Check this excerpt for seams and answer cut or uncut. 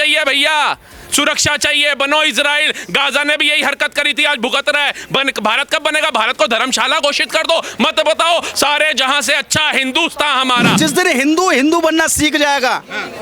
cut